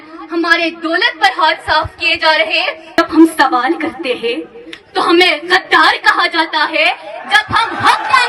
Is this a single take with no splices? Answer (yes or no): no